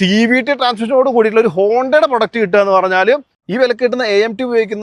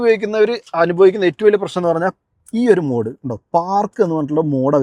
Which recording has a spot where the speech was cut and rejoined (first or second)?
first